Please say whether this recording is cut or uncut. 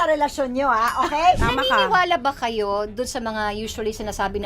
cut